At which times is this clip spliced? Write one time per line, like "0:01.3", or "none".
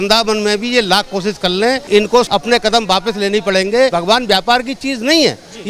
0:02.1
0:03.9